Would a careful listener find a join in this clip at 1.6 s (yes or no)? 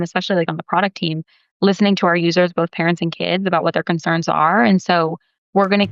no